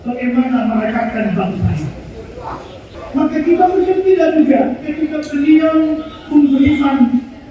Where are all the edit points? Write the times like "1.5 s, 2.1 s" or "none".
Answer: 2.9 s